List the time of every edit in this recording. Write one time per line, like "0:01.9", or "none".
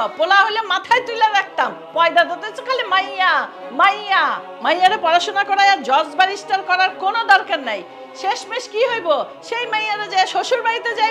none